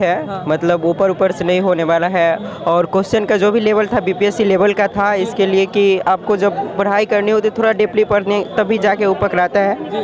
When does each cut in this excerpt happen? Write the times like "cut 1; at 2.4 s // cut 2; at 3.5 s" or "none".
none